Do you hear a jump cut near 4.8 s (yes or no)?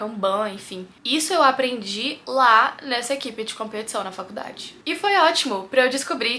yes